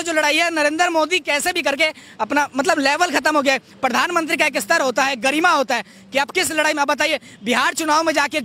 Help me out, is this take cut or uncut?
uncut